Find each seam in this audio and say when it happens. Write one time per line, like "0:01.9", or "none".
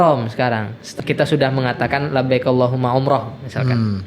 0:00.9